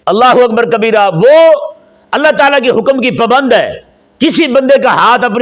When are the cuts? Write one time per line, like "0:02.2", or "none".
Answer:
none